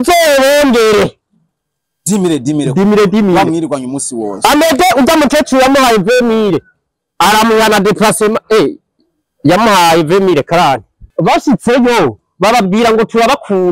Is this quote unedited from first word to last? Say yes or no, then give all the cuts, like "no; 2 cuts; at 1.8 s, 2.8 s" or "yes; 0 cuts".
no; 1 cut; at 11.0 s